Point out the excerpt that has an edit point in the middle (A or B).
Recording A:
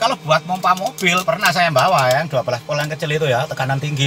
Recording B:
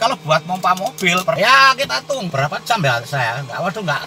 B